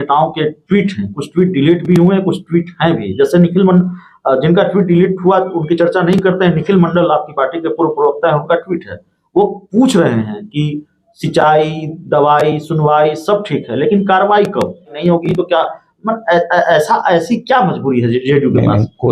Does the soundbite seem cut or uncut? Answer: cut